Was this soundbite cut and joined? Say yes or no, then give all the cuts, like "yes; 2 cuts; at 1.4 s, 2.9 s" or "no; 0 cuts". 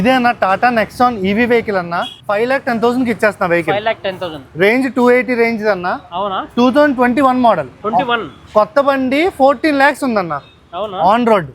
yes; 1 cut; at 2.1 s